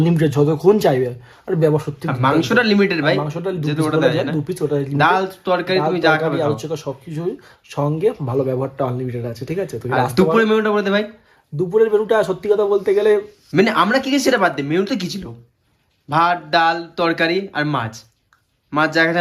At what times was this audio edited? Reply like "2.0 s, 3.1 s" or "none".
none

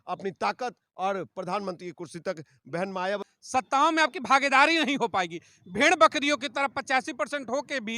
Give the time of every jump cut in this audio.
3.3 s

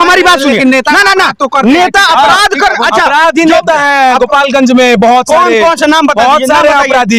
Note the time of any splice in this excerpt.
none

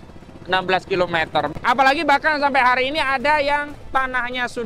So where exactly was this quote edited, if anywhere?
1.5 s

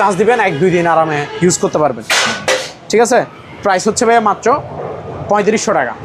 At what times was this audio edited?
none

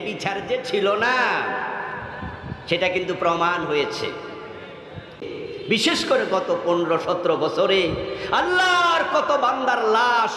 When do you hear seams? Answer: 5.3 s

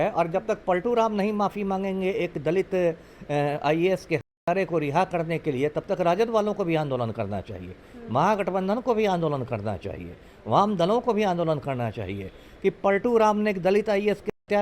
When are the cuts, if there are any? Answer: none

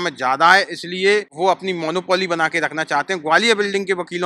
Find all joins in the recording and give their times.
1.3 s

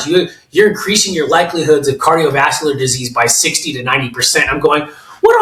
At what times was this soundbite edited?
none

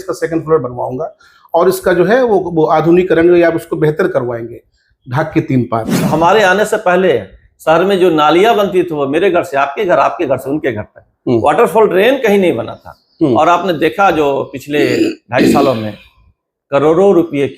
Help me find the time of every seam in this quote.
6.1 s

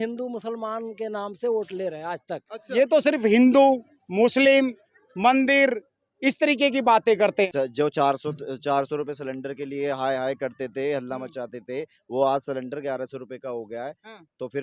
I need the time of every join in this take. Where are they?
2.6 s, 7.5 s

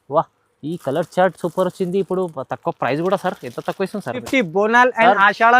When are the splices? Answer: 4.2 s

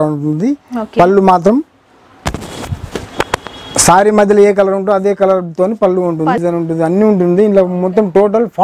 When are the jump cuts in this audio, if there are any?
6.4 s

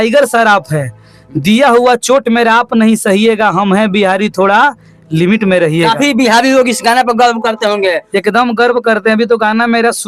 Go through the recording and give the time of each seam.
none

